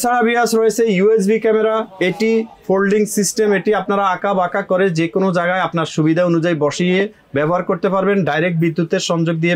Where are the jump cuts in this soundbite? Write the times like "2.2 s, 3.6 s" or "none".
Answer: none